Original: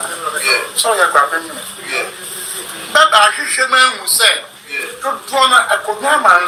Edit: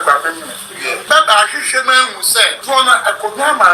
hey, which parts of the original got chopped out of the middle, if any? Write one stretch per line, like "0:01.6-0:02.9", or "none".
0:02.1-0:02.9
0:04.4-0:05.2